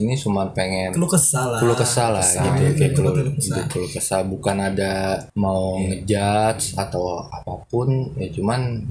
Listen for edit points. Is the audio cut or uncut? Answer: cut